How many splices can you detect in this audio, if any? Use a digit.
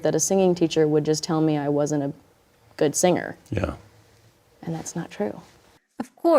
0